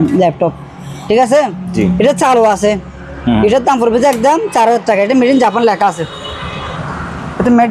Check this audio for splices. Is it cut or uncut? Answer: uncut